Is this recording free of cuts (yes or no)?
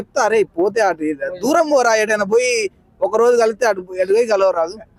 yes